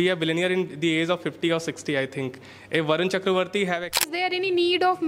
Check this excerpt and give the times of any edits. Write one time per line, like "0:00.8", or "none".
0:04.2